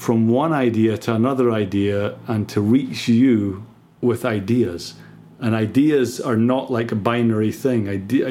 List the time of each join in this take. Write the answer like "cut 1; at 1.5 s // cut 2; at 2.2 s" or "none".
cut 1; at 3.7 s